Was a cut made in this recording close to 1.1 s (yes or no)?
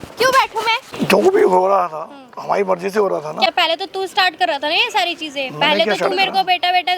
yes